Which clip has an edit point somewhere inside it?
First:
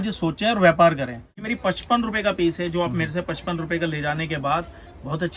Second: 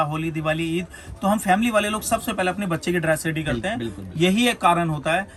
first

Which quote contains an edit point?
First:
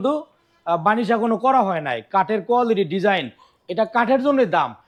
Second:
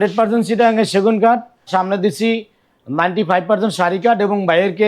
second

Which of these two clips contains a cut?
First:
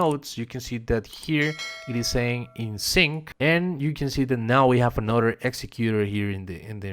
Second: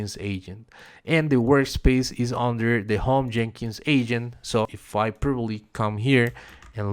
first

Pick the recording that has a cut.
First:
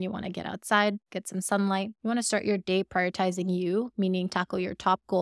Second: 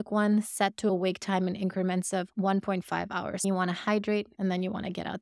second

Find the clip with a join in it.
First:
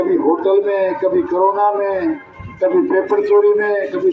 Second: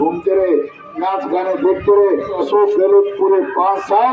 second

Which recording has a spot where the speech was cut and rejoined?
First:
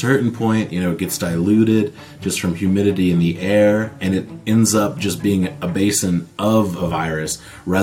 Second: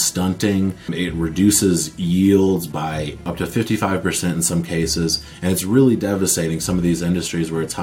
second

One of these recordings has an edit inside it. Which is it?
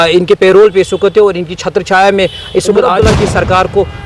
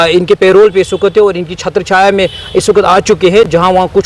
first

